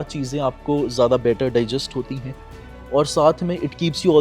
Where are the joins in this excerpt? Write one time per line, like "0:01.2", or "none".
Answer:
none